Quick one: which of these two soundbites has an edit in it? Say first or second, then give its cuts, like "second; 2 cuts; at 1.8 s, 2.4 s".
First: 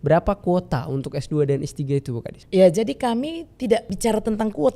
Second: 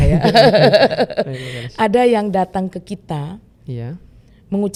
first; 2 cuts; at 2.4 s, 3.9 s